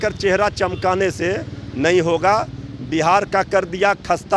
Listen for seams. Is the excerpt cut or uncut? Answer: uncut